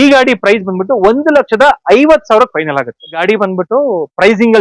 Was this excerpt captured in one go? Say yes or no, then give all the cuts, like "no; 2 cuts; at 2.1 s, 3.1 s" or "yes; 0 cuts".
no; 1 cut; at 3.2 s